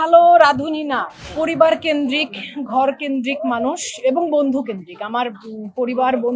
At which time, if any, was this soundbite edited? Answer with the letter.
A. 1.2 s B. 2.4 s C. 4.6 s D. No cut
A